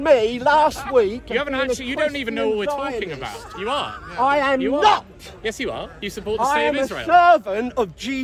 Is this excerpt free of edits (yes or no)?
yes